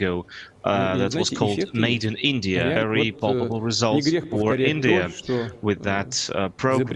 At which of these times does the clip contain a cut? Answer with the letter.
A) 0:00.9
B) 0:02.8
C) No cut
B